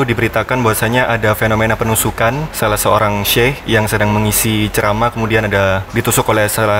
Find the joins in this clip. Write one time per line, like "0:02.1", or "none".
0:02.5
0:03.6
0:05.8